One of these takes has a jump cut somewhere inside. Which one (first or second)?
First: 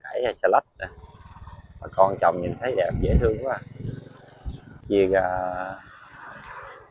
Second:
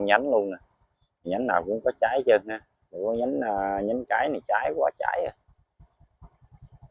first